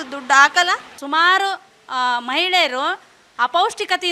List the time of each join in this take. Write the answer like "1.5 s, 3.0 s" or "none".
0.9 s